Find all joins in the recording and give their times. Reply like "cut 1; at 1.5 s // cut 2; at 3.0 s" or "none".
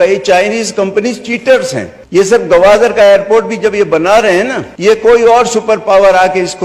cut 1; at 2.3 s // cut 2; at 4.6 s